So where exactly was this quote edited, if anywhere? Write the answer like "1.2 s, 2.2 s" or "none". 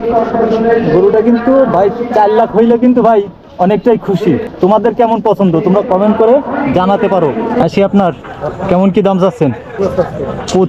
4.5 s, 7.6 s, 8.3 s, 9.8 s